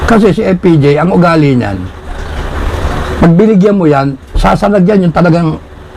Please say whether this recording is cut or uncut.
uncut